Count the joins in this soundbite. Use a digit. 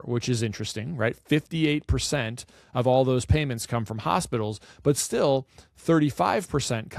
0